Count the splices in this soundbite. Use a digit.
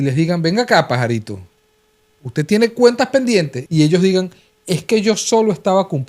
1